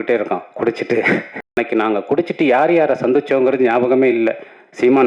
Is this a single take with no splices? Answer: no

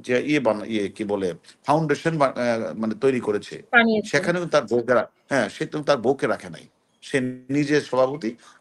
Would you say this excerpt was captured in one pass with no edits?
yes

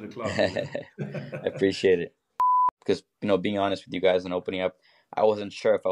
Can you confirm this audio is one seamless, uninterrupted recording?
no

